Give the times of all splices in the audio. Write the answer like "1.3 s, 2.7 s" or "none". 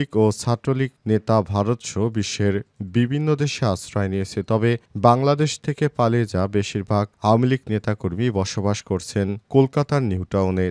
none